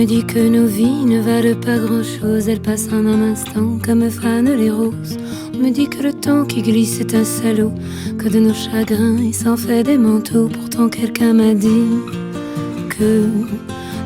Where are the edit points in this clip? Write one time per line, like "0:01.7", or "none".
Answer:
none